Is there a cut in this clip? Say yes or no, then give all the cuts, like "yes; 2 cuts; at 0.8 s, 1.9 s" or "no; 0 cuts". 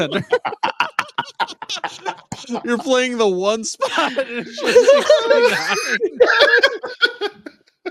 no; 0 cuts